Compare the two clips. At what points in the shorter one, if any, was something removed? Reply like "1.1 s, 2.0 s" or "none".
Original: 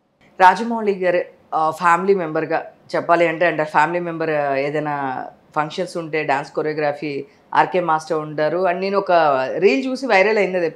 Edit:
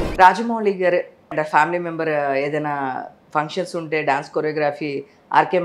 1.3 s

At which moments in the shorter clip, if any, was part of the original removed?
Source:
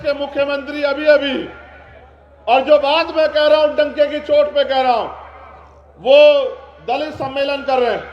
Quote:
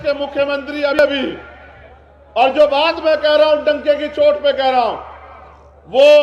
1.0 s

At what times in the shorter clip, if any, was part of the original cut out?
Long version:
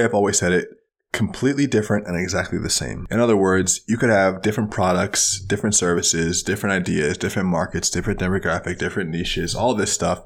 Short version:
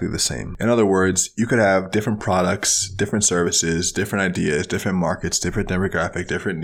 none

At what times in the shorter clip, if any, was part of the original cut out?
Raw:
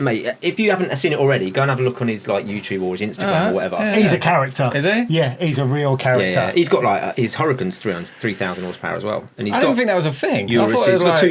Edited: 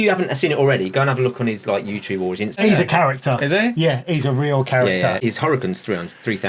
2.6 s, 5.2 s

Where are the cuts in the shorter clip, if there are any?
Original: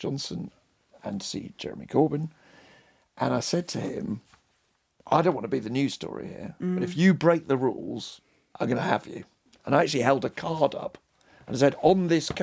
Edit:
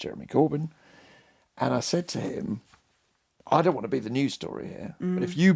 none

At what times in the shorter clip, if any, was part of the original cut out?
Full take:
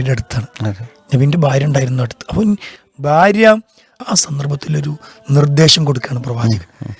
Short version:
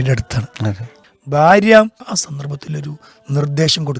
1.0 s, 2.0 s

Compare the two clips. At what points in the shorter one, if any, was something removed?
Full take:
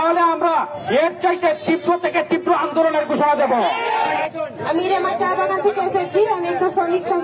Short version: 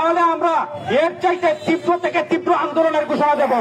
none

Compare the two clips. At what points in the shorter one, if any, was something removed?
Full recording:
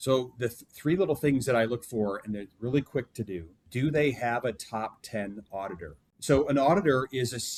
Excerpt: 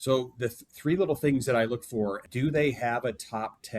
2.2 s

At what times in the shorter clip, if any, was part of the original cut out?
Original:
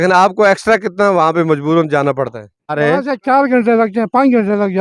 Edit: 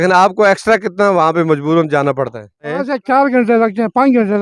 2.7 s

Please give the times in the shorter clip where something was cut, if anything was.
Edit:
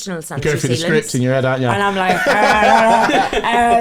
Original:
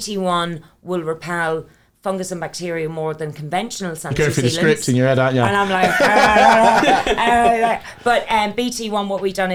none

